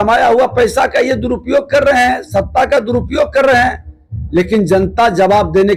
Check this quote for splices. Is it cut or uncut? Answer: uncut